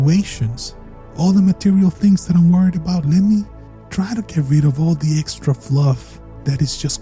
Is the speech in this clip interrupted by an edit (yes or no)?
no